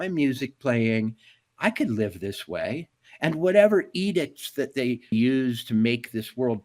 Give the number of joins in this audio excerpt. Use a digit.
1